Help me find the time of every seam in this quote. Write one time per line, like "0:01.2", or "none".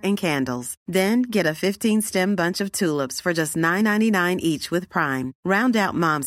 none